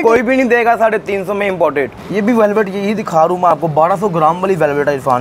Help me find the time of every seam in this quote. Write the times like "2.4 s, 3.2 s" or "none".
2.0 s